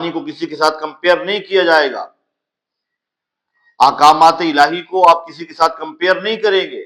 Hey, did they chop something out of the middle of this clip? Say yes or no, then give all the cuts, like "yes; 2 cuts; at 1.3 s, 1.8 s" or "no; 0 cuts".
no; 0 cuts